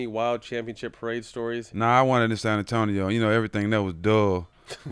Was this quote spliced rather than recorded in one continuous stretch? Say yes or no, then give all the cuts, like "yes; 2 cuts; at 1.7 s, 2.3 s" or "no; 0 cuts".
yes; 1 cut; at 1.7 s